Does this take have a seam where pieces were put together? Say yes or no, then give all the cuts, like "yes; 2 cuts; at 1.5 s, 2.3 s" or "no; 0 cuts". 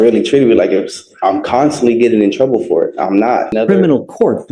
yes; 1 cut; at 3.5 s